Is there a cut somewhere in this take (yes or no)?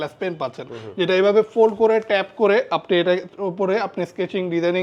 no